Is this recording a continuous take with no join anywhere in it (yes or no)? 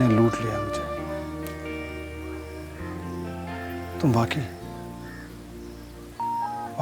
yes